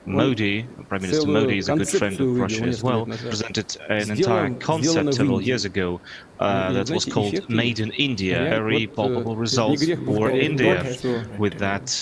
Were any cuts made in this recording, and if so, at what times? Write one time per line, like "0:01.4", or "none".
0:03.4
0:08.5